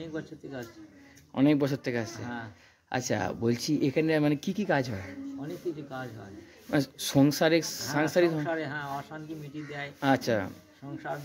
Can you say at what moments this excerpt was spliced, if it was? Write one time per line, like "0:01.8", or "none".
none